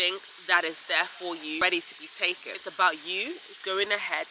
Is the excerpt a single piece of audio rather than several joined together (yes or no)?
no